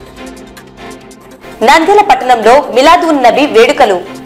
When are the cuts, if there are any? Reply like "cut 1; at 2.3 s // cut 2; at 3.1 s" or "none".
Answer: cut 1; at 1.0 s